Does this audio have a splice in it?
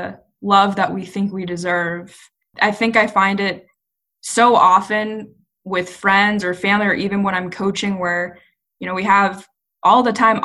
no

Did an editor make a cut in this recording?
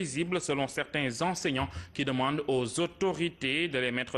no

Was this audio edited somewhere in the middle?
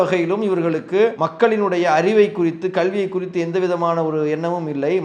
yes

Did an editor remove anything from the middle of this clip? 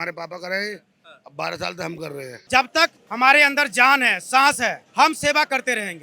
yes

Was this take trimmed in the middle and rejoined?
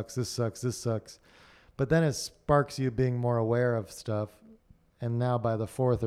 no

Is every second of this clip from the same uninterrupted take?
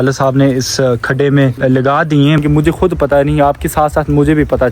no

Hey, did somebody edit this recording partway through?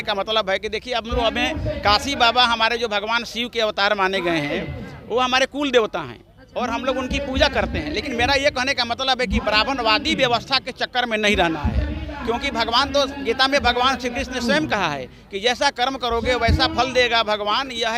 no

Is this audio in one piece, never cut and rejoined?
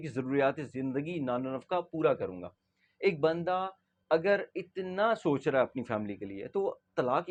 yes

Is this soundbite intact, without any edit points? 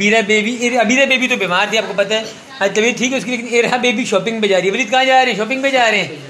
yes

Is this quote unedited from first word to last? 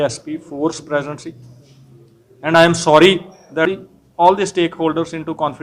no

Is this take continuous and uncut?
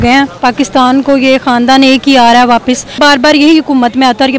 yes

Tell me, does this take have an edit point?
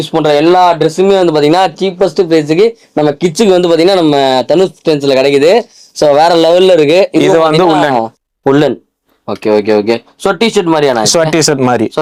no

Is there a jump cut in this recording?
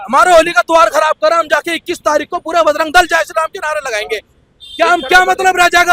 no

